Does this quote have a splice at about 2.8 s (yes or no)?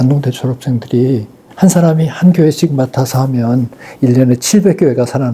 no